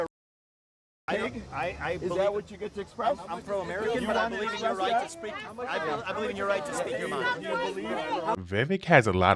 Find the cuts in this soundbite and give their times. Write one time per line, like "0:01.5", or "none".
0:08.4